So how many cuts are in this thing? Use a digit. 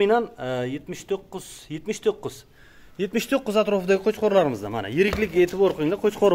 0